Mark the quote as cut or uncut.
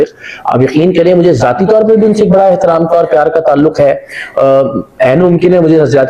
uncut